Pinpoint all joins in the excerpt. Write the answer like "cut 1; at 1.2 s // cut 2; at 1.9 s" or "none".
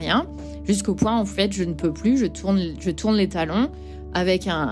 none